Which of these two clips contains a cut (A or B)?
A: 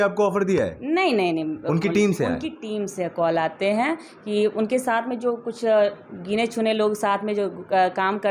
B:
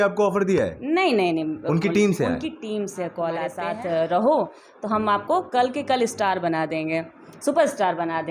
B